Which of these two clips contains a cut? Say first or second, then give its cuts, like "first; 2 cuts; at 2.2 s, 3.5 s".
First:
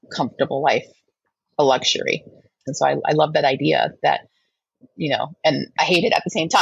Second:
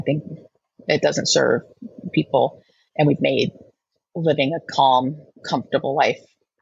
first; 1 cut; at 2.7 s